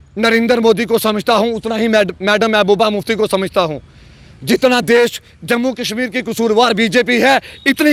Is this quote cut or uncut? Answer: uncut